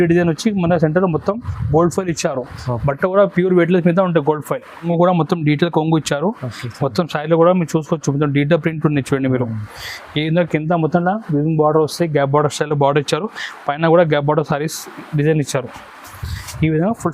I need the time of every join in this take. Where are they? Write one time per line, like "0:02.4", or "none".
0:04.8